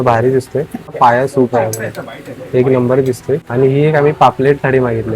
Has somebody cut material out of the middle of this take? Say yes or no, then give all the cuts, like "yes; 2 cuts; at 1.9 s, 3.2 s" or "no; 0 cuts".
yes; 2 cuts; at 0.9 s, 3.5 s